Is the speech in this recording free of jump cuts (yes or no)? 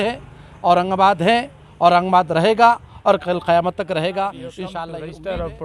no